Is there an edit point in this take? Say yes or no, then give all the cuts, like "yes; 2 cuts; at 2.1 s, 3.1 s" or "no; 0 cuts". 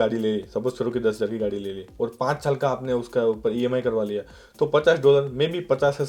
no; 0 cuts